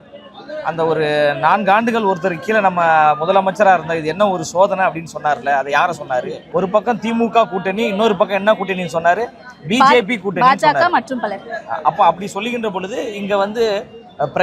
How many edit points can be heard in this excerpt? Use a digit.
1